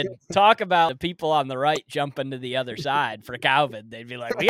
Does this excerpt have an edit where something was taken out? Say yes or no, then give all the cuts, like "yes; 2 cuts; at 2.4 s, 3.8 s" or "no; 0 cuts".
yes; 1 cut; at 1.0 s